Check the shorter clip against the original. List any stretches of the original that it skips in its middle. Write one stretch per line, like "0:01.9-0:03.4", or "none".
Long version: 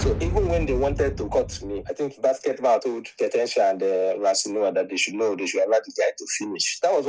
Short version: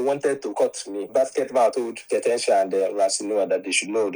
0:01.8-0:02.1
0:03.9-0:04.1